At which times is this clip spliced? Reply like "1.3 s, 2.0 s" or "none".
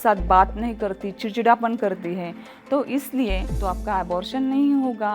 3.5 s